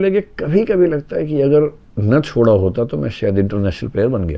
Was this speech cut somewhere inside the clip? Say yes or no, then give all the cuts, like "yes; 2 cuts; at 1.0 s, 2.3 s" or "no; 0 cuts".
no; 0 cuts